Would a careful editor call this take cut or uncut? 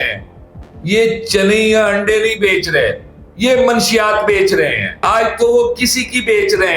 cut